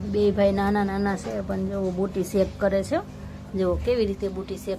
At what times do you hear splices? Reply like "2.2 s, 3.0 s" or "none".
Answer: none